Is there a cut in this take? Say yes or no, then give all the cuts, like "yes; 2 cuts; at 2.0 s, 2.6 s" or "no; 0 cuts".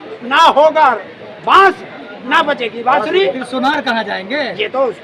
no; 0 cuts